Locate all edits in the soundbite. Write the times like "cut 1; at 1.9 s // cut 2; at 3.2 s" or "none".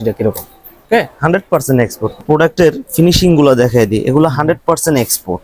cut 1; at 2.2 s